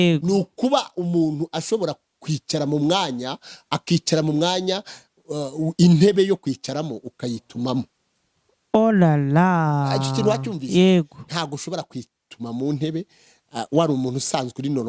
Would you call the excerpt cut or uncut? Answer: uncut